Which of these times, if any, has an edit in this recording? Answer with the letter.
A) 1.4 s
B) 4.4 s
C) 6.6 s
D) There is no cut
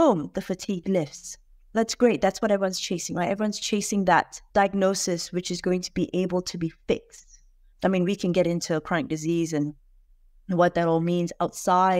B